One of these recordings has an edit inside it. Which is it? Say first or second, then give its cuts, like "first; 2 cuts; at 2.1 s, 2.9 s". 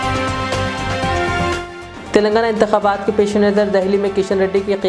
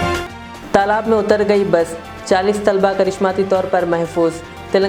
first; 1 cut; at 1.7 s